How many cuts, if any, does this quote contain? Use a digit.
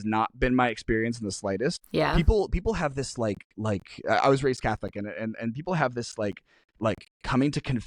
1